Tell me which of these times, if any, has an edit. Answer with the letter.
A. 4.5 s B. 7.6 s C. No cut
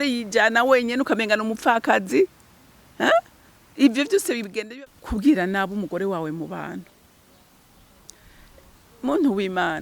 A